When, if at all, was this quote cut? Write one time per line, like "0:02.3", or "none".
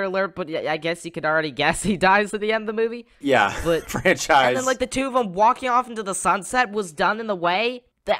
0:03.1